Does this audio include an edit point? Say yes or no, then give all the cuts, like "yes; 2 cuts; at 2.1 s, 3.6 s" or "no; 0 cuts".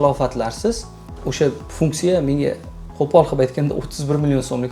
no; 0 cuts